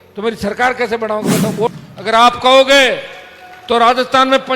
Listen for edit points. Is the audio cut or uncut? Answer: cut